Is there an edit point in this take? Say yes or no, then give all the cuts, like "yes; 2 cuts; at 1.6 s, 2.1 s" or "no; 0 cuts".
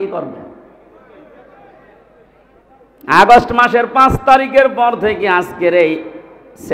no; 0 cuts